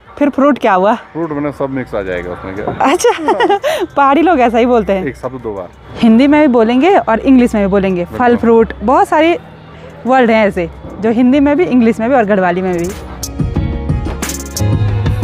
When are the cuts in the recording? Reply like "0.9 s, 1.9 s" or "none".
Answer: none